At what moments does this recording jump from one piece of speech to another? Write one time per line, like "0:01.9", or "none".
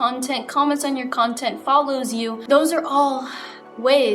0:02.4